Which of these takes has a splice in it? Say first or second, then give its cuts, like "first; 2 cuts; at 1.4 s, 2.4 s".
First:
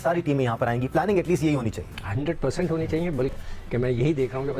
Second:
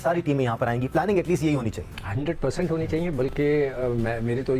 first; 1 cut; at 3.3 s